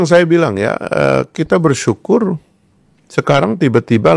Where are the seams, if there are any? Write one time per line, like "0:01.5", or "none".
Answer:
none